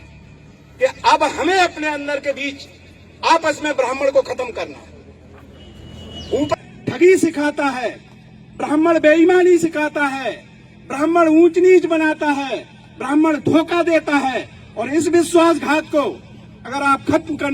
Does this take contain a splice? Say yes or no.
yes